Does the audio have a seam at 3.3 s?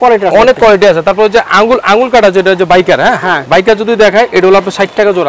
yes; 1 cut; at 3.3 s

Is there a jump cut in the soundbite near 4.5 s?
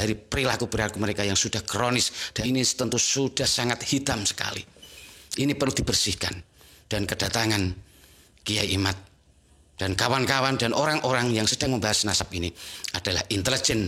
no; 1 cut; at 2.2 s

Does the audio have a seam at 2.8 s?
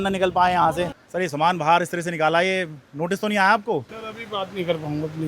no; 1 cut; at 1.0 s

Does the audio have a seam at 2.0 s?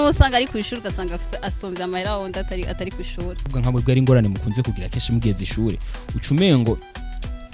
no; 1 cut; at 3.6 s

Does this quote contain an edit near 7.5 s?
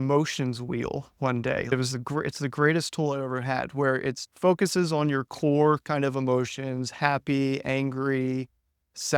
no; 2 cuts; at 1.7 s, 4.3 s

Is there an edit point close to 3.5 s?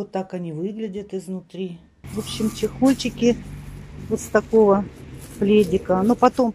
no; 1 cut; at 1.9 s

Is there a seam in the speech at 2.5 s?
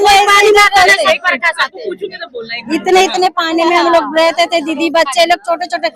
no; 0 cuts

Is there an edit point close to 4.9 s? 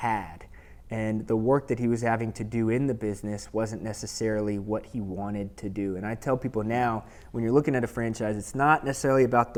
no; 0 cuts

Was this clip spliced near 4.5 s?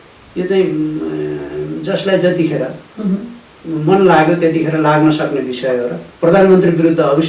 no; 1 cut; at 6.0 s

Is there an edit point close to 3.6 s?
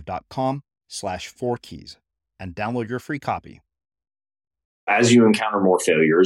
no; 1 cut; at 4.9 s

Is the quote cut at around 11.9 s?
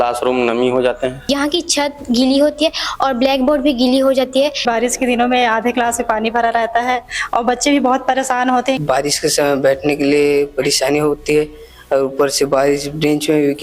no; 3 cuts; at 1.3 s, 4.6 s, 8.8 s

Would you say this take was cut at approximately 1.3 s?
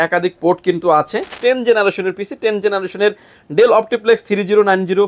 yes; 1 cut; at 1.3 s

